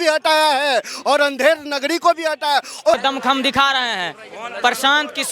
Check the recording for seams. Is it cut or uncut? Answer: cut